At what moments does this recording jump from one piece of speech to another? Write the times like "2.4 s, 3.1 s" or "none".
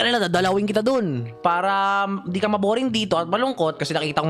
1.3 s